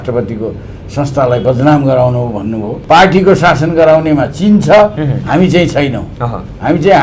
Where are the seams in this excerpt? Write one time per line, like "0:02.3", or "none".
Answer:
0:02.7